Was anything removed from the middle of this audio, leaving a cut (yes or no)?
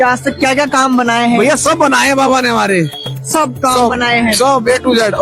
no